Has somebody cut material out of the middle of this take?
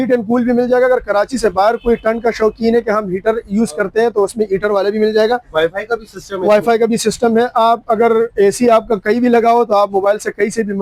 no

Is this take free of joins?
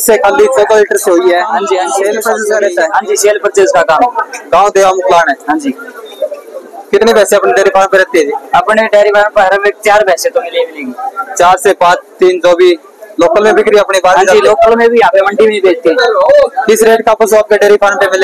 no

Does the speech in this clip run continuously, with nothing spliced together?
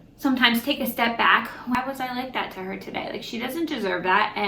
no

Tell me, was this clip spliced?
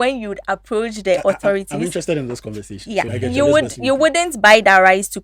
yes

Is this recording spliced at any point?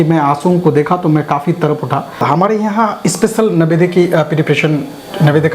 yes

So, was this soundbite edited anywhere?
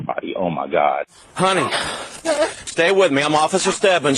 yes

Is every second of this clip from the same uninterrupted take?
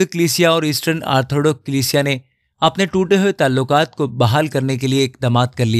yes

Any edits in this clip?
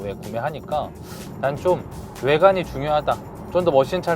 yes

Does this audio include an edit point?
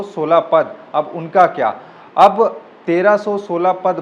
no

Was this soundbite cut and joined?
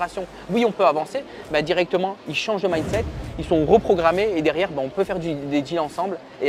no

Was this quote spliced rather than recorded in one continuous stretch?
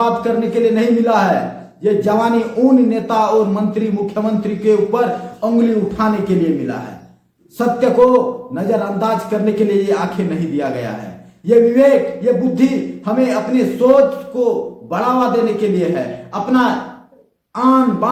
no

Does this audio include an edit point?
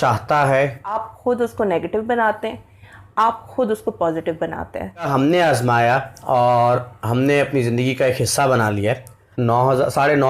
yes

